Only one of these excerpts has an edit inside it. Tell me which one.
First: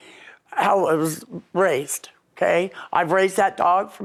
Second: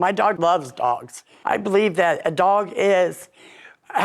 second; 1 cut; at 1.3 s

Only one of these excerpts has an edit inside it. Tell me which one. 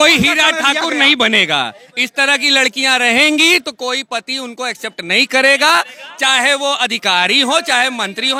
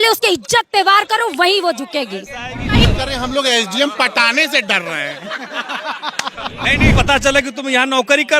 second; 2 cuts; at 2.9 s, 7.0 s

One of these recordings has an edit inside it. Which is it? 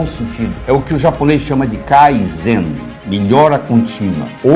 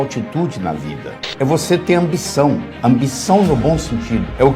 second; 1 cut; at 1.3 s

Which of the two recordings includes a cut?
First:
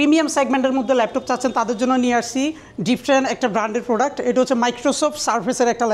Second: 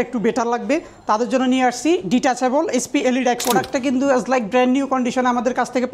second; 1 cut; at 3.4 s

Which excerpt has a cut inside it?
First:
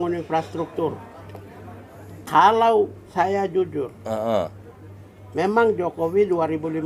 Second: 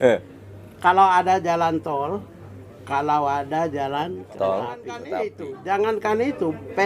second; 1 cut; at 5.0 s

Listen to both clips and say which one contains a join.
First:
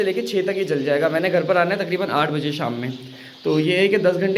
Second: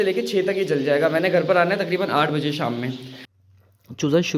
second; 1 cut; at 3.3 s

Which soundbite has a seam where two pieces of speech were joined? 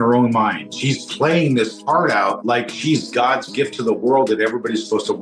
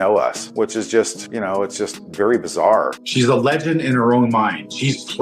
second; 1 cut; at 3.0 s

